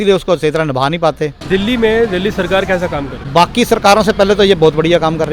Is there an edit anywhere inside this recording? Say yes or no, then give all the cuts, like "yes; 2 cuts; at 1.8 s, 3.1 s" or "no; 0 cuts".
yes; 2 cuts; at 1.4 s, 3.2 s